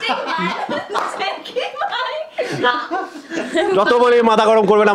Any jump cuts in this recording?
no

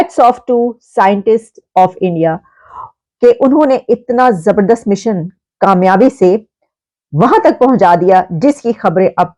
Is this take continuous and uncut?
yes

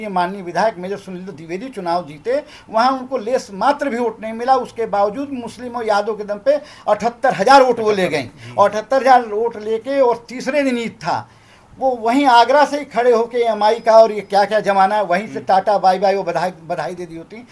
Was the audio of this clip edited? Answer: no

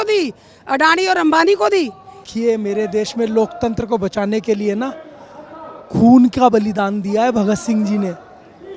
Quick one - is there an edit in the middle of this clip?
yes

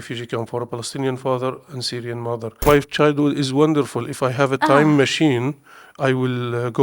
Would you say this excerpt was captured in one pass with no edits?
no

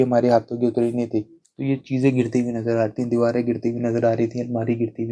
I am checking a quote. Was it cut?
yes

